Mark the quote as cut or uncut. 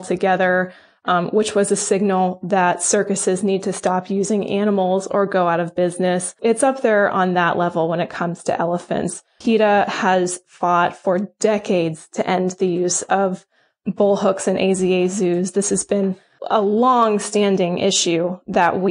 cut